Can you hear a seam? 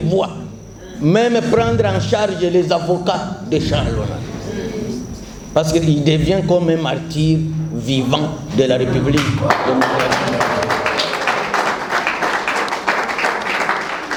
no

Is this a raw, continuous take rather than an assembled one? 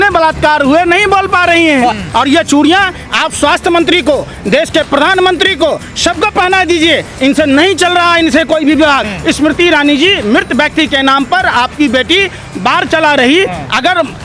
no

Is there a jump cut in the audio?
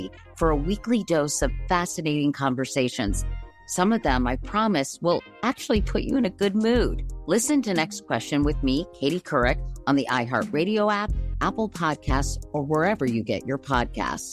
no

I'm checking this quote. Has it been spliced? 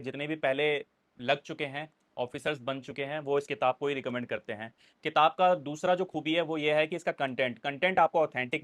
no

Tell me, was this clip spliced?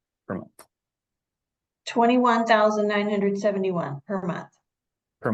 no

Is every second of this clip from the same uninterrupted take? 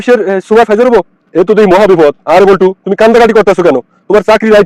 no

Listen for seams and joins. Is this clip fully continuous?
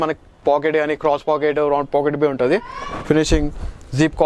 yes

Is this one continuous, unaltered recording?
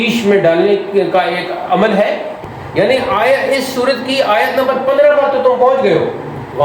no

